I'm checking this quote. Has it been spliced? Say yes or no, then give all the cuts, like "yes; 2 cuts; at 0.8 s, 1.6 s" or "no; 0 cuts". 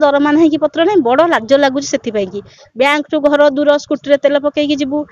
no; 0 cuts